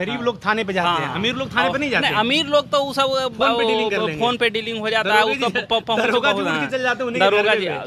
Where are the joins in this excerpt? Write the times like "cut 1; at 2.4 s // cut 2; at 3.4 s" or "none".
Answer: none